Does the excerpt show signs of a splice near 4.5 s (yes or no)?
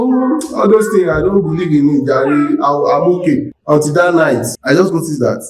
yes